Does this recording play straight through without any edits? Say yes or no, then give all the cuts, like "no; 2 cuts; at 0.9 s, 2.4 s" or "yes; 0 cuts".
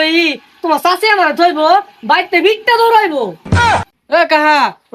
yes; 0 cuts